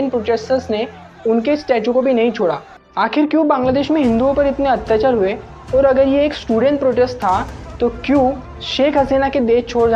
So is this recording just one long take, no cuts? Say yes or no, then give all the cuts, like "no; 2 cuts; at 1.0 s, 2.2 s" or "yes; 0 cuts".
no; 1 cut; at 3.0 s